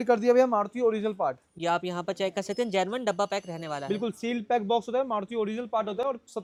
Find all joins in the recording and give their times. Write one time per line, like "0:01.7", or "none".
none